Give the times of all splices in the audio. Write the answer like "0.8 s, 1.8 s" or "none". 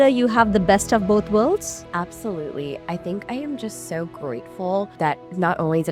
1.8 s, 4.9 s